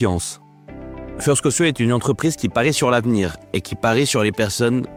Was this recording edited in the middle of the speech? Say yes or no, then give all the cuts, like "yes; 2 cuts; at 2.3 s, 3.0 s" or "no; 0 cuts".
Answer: no; 0 cuts